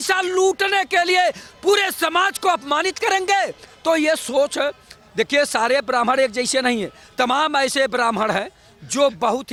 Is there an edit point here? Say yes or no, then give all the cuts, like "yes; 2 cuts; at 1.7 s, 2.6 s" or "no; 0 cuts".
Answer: no; 0 cuts